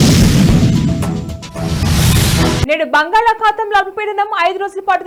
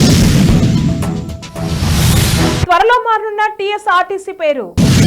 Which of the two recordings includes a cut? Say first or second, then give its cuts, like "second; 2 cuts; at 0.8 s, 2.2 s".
second; 1 cut; at 2.5 s